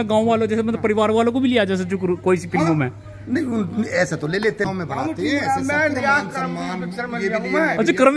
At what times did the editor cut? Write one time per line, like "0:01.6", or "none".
0:04.7